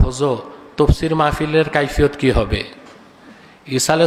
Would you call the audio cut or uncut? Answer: uncut